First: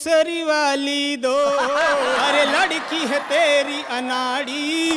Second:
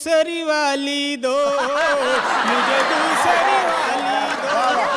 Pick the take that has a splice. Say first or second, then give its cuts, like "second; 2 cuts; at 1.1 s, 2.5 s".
first; 1 cut; at 2.2 s